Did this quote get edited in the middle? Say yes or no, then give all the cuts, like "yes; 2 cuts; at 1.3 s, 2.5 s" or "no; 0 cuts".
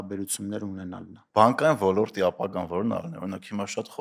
yes; 1 cut; at 1.1 s